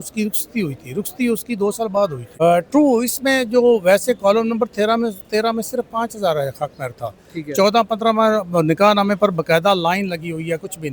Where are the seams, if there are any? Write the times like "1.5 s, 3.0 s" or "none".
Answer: 2.2 s